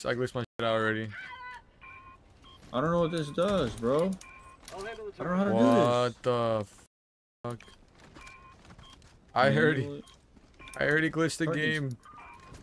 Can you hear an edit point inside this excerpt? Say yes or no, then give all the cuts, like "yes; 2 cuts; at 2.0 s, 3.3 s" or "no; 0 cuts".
no; 0 cuts